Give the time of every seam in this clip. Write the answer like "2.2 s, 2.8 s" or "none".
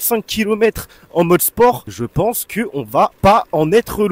1.9 s, 3.1 s